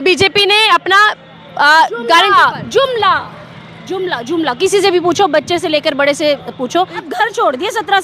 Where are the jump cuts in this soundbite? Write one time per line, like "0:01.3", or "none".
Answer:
0:07.1